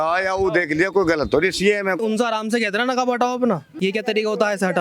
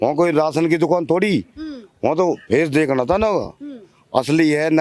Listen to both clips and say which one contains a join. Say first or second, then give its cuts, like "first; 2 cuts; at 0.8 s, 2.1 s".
first; 2 cuts; at 2.0 s, 3.7 s